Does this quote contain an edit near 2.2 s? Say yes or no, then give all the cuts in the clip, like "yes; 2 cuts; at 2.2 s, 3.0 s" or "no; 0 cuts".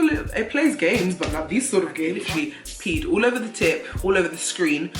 yes; 1 cut; at 2.2 s